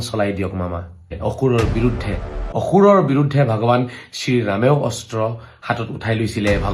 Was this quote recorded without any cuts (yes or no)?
no